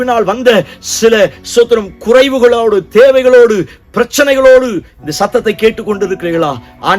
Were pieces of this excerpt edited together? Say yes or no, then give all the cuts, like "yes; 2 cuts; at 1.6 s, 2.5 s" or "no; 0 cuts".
no; 0 cuts